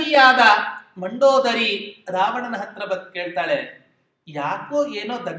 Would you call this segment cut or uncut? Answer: uncut